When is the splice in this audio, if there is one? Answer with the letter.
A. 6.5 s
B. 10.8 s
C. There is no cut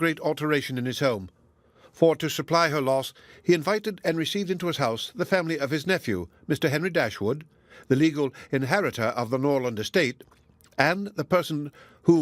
B